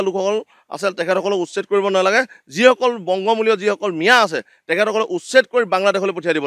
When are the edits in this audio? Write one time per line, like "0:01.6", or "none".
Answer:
none